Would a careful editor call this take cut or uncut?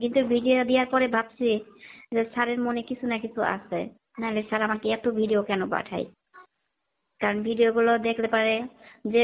uncut